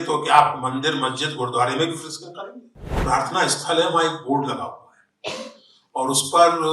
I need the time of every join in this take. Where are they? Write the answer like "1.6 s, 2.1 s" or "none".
3.0 s